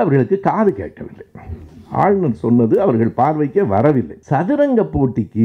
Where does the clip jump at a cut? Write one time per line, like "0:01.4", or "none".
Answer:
0:04.2